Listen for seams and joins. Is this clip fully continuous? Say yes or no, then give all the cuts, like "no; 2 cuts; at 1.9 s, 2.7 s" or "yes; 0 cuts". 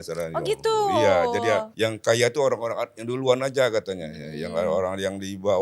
no; 1 cut; at 1.7 s